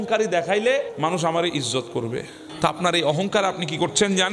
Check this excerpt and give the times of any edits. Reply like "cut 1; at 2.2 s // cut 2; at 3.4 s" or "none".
cut 1; at 0.9 s // cut 2; at 2.4 s